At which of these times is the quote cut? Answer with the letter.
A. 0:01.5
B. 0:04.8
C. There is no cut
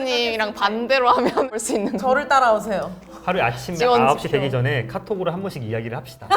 A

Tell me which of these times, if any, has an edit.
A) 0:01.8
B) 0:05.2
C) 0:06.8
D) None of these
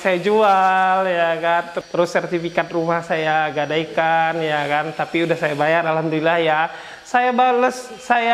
A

